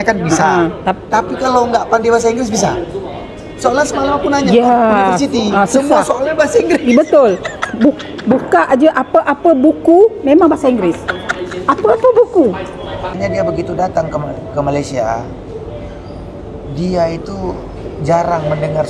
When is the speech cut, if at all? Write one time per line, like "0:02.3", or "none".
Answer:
0:13.1